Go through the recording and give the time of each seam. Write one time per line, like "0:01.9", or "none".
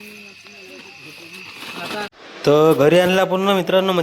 0:02.5

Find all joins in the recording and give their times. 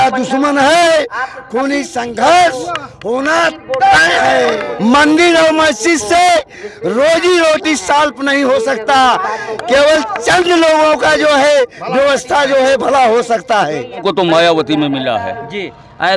0:04.7
0:14.0

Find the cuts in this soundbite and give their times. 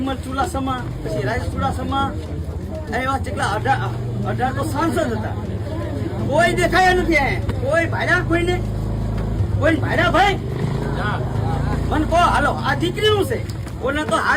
none

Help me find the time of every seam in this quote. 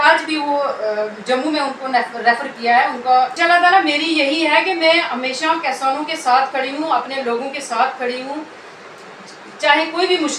0:03.4

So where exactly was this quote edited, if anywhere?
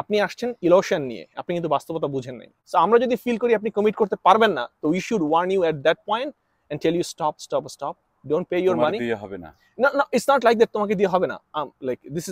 0:02.5

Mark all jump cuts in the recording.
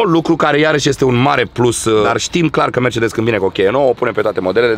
none

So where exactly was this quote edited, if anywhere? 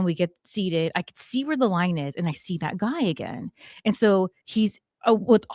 0:04.7

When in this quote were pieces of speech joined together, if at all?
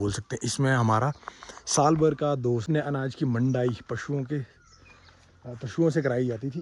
0:02.6

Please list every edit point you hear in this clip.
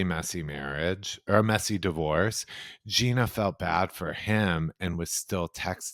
none

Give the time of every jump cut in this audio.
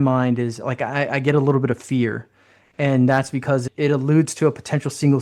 none

